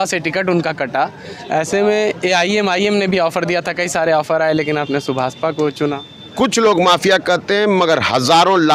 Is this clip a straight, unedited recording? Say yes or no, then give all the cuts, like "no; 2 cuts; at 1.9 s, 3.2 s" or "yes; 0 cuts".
no; 1 cut; at 6.3 s